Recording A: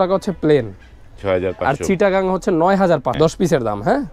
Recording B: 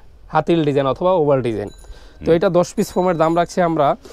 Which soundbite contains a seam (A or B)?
A